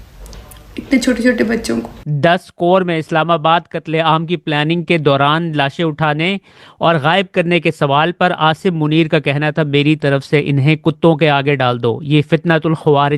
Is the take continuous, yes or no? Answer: no